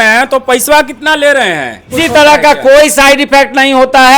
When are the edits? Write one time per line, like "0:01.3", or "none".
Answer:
0:01.8